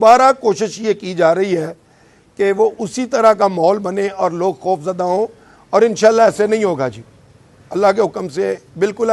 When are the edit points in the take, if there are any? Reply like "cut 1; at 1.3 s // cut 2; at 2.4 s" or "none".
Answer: none